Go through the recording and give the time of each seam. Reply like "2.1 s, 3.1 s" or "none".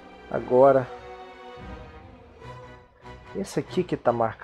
none